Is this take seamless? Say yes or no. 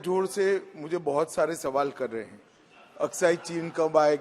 yes